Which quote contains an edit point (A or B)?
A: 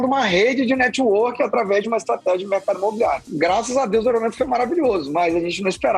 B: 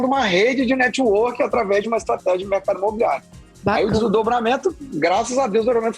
A